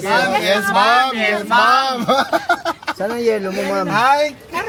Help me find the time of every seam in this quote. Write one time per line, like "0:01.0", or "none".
none